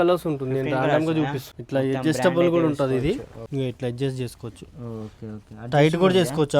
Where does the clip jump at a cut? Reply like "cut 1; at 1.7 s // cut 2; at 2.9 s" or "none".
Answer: cut 1; at 1.4 s // cut 2; at 3.4 s